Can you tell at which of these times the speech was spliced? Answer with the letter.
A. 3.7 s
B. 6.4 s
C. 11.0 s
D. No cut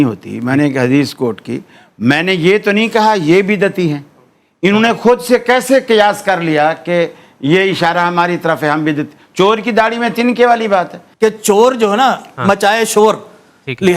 C